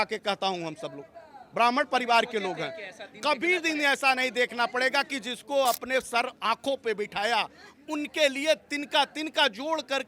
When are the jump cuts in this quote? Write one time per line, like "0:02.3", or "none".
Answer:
none